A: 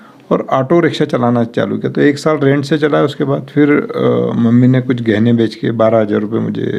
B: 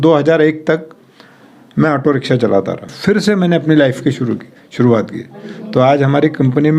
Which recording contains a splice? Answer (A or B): B